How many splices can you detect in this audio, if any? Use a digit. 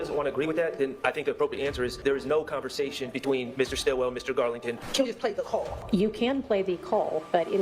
3